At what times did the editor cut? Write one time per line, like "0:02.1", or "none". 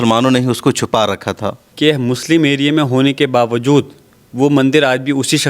0:01.6